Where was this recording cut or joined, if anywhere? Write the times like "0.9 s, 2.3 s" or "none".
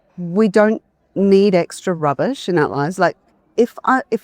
none